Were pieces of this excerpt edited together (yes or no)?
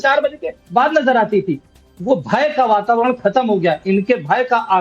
yes